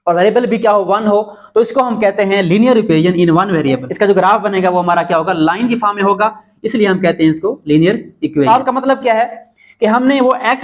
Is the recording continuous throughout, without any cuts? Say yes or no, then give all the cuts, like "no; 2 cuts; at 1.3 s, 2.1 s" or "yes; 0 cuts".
no; 2 cuts; at 3.9 s, 8.5 s